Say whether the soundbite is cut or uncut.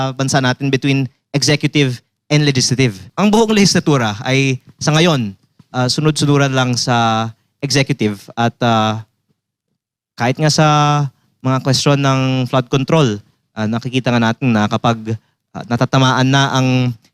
cut